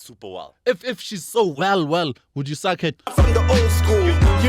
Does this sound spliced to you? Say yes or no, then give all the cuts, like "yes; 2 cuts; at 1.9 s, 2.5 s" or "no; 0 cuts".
yes; 1 cut; at 2.9 s